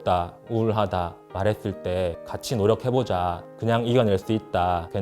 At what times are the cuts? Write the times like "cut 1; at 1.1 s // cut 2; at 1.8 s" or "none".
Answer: cut 1; at 2.2 s